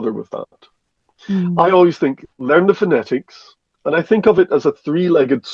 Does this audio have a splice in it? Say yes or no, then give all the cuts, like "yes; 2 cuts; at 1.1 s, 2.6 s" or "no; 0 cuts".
no; 0 cuts